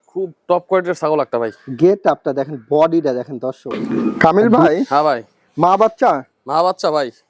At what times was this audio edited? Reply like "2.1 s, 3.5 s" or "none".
3.7 s